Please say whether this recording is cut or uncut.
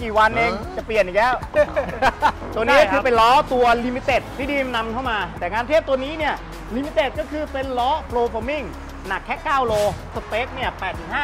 cut